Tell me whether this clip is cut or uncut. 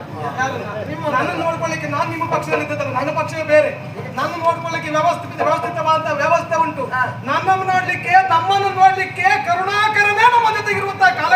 uncut